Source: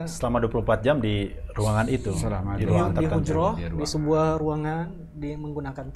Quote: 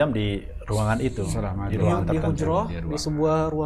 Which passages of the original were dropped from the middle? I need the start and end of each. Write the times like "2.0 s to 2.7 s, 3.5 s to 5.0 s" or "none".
none